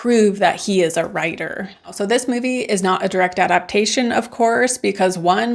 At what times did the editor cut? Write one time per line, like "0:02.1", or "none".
0:01.8